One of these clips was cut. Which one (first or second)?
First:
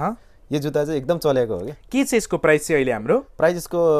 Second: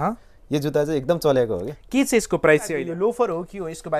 second